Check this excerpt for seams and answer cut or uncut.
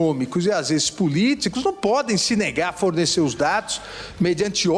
uncut